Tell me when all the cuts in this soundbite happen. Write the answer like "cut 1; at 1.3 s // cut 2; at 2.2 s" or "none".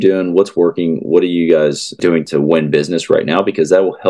cut 1; at 2.1 s